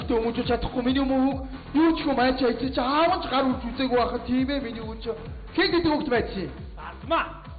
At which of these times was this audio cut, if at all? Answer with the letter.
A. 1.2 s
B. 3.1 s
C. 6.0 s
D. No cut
B